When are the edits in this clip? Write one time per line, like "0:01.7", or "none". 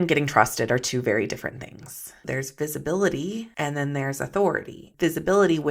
0:02.2
0:04.8

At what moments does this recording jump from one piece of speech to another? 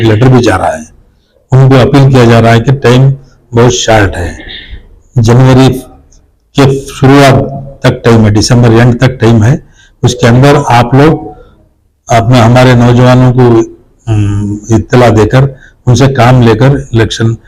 none

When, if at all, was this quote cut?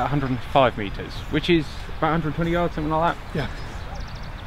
none

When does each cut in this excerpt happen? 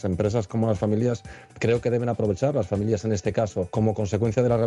0:03.7

